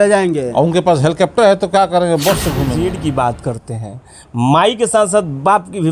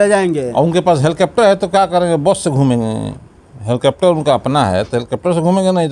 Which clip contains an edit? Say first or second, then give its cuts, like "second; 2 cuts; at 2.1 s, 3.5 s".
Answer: first; 1 cut; at 2.7 s